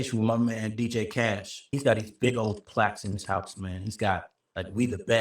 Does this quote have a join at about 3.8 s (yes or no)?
no